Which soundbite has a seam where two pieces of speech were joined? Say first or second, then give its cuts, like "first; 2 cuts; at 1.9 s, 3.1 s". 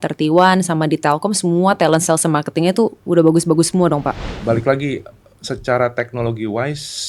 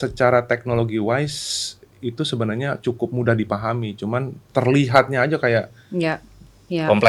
first; 1 cut; at 4.3 s